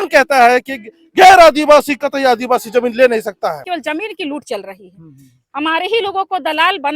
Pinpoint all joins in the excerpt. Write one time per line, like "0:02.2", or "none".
0:03.7